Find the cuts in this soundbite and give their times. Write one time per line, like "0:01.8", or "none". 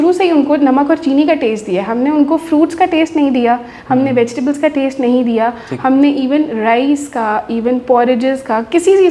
none